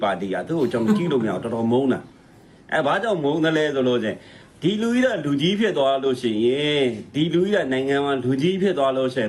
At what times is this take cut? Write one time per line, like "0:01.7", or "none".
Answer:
none